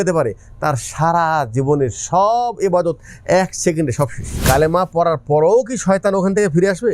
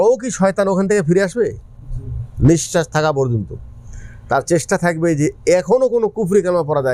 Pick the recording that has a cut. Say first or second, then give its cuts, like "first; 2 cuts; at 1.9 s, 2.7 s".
first; 1 cut; at 4.3 s